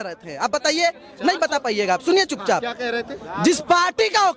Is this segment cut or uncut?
uncut